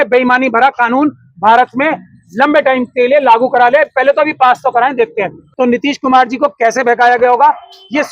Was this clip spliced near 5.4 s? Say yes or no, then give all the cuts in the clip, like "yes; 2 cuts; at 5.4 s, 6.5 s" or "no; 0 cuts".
yes; 1 cut; at 5.4 s